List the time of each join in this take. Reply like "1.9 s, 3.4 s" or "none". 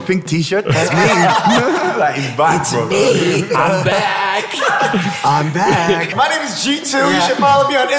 6.1 s